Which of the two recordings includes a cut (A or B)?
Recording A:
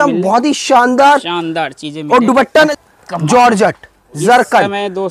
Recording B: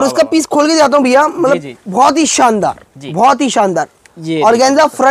A